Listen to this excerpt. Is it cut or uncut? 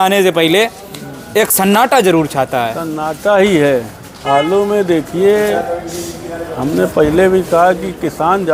uncut